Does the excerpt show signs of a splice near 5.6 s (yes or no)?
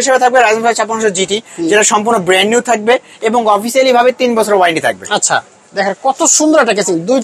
yes